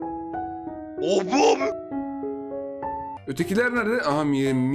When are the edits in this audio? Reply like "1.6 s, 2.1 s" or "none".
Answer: 3.1 s